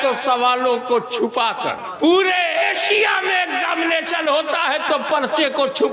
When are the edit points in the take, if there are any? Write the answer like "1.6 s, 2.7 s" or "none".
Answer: 1.8 s